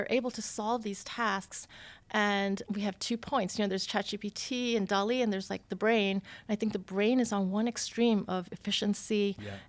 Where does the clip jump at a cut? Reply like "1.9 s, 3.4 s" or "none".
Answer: 2.6 s